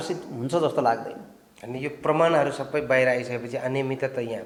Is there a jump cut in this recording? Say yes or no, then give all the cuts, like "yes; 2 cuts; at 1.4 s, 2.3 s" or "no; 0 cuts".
no; 0 cuts